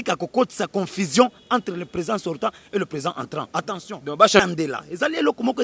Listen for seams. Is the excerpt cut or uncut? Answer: cut